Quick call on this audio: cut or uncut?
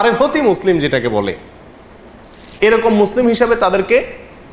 uncut